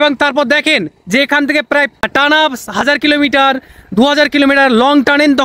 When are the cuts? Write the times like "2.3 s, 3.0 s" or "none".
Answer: 2.1 s